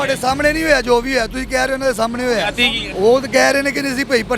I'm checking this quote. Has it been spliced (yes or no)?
yes